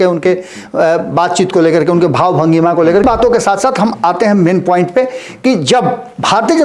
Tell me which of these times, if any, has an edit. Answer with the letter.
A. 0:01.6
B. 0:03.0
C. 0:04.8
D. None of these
B